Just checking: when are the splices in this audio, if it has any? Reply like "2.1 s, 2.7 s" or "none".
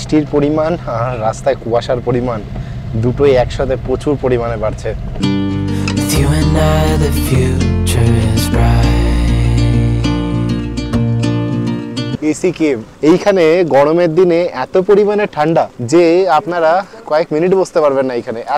5.1 s, 12.5 s, 15.8 s, 17.0 s